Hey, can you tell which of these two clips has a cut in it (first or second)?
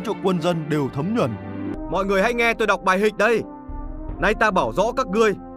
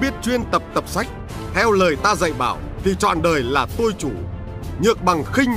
first